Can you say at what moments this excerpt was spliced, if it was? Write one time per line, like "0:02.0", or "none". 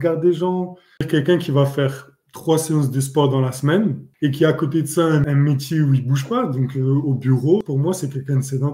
0:01.1
0:04.1
0:05.2
0:07.6